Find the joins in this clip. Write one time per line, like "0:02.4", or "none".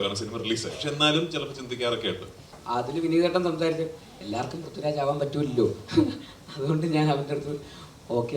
0:02.6